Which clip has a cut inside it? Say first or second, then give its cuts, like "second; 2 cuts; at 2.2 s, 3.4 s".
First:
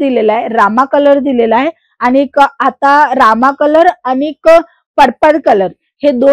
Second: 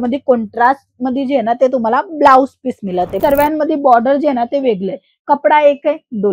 second; 1 cut; at 3.1 s